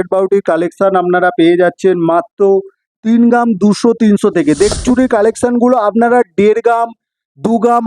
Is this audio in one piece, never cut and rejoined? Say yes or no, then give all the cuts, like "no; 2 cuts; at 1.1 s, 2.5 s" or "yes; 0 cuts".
no; 1 cut; at 4.7 s